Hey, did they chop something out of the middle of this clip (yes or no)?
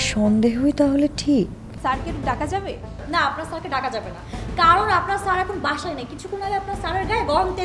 yes